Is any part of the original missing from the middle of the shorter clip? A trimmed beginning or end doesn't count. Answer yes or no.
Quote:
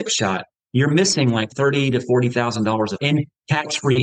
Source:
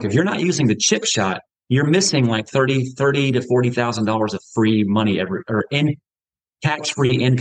yes